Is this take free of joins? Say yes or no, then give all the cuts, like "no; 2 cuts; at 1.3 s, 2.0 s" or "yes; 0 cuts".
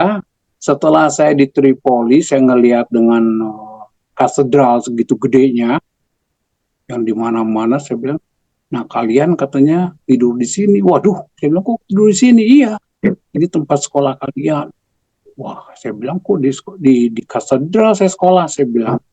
yes; 0 cuts